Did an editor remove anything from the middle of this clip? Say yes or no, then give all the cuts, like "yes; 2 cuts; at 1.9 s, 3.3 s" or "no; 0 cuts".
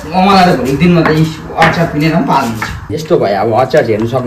yes; 1 cut; at 2.9 s